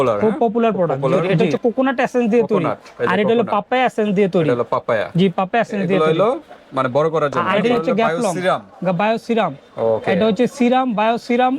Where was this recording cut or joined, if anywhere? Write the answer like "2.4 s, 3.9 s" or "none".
1.3 s, 7.7 s